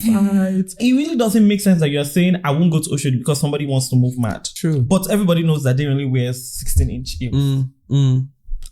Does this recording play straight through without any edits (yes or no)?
no